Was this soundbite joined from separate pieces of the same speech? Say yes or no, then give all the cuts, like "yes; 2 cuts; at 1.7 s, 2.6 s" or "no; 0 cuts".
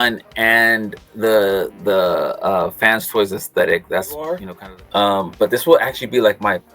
yes; 1 cut; at 4.5 s